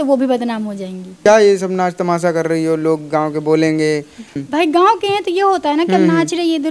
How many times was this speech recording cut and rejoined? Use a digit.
2